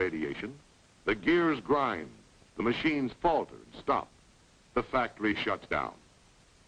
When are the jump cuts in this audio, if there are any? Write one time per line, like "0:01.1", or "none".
none